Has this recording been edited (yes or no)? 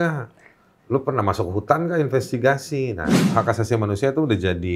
yes